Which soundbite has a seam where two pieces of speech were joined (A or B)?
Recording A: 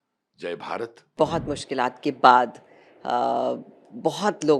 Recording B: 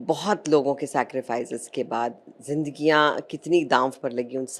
A